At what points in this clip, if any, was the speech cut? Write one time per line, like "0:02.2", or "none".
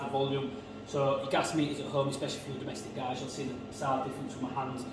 none